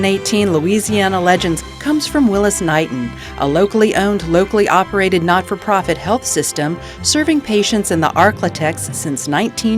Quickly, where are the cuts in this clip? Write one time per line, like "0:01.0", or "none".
0:01.7